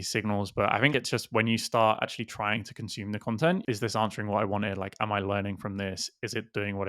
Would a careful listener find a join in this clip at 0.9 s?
yes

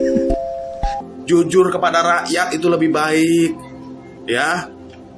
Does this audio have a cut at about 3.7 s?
no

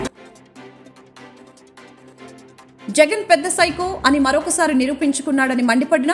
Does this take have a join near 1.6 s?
yes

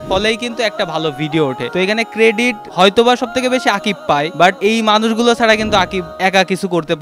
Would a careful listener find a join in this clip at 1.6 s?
yes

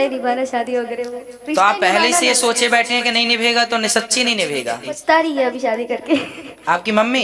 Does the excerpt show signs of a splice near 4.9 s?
yes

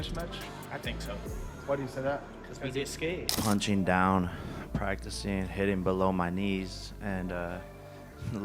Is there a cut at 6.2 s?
no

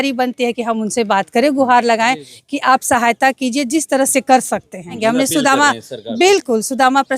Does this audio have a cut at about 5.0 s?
yes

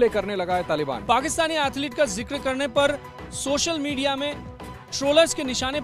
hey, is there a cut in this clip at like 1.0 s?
yes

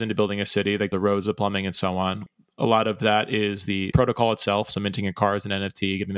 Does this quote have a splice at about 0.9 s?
yes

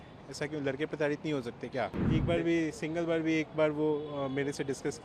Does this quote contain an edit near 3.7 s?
no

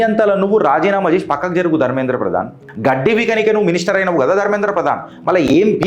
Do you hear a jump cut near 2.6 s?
yes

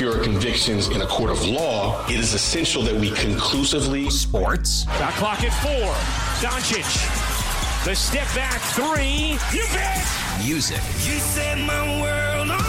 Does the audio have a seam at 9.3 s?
no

